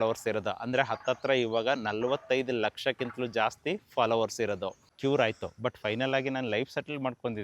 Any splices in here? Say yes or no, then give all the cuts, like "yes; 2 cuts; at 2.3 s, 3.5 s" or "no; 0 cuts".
yes; 1 cut; at 4.9 s